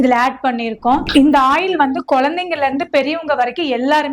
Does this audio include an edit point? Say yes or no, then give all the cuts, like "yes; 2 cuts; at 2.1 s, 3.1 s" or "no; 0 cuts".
yes; 1 cut; at 1.1 s